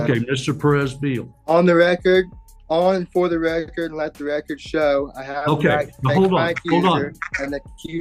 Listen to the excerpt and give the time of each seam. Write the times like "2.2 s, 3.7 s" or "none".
1.3 s